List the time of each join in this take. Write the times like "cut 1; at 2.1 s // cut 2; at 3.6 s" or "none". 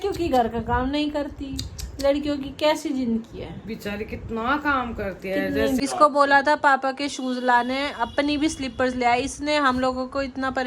cut 1; at 5.8 s